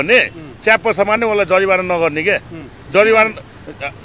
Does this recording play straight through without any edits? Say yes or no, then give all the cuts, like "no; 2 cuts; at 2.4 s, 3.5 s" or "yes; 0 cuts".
yes; 0 cuts